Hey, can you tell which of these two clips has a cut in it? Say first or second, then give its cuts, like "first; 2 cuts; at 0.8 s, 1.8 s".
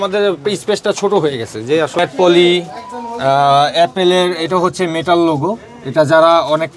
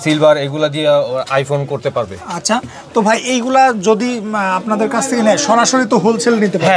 first; 1 cut; at 2.0 s